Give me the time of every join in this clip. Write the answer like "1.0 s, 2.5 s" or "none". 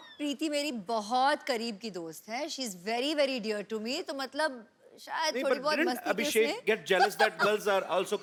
none

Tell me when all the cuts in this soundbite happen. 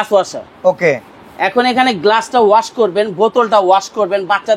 none

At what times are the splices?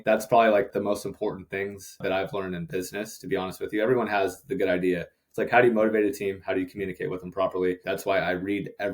7.8 s

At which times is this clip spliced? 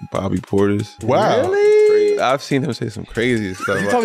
1.0 s, 2.2 s

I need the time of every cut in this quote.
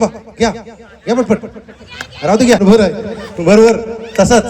2.6 s

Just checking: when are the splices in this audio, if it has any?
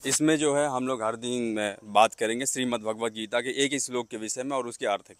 none

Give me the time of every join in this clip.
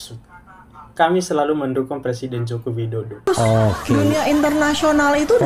3.3 s

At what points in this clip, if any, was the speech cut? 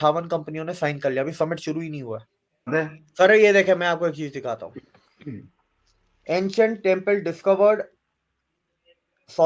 2.7 s

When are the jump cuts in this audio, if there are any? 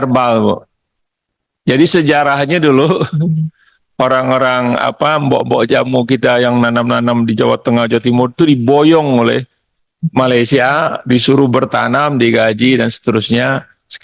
none

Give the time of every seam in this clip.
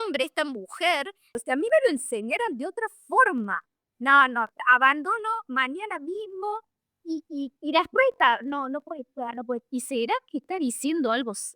1.3 s

